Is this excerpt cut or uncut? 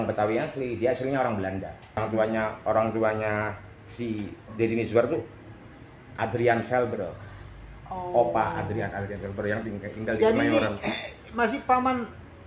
cut